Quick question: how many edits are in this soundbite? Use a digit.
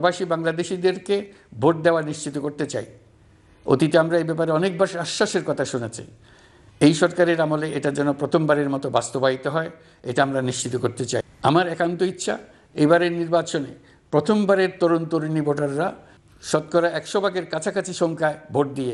1